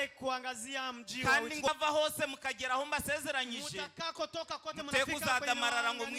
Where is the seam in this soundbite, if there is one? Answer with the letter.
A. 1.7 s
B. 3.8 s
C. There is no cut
A